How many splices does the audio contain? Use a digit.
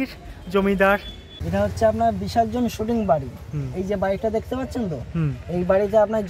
1